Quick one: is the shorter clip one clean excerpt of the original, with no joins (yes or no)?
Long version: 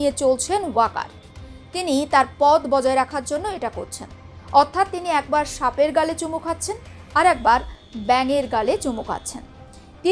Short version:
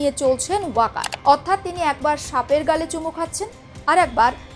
no